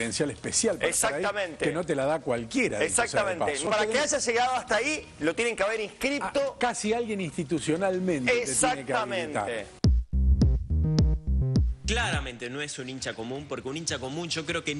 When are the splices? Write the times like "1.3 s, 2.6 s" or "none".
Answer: 3.7 s